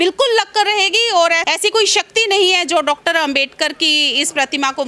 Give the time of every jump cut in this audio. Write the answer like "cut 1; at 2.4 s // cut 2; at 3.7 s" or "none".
cut 1; at 1.4 s

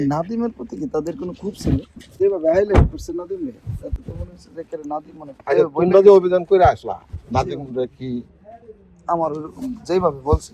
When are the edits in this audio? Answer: cut 1; at 2.1 s

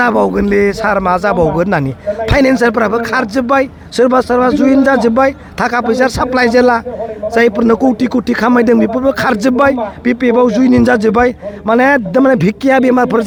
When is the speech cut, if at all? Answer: none

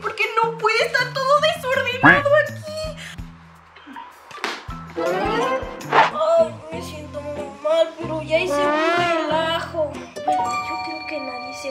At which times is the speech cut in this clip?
cut 1; at 3.1 s // cut 2; at 6.1 s

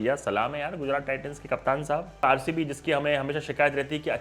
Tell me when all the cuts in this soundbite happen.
cut 1; at 2.2 s

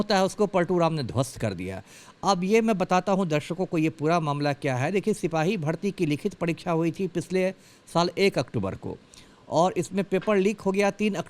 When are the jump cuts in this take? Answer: none

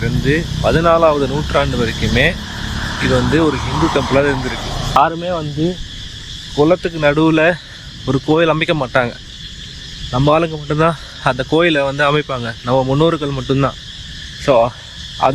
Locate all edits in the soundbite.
cut 1; at 5.0 s

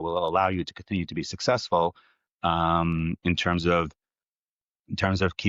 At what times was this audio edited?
none

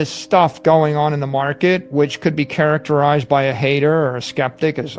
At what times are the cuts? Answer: none

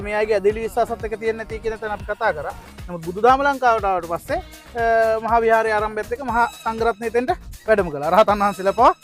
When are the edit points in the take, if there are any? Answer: none

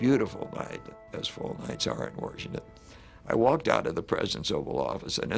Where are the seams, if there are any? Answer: cut 1; at 1.0 s

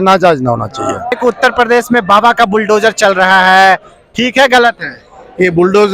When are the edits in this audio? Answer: cut 1; at 1.1 s

